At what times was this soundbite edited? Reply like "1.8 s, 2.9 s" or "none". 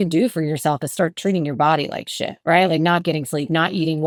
none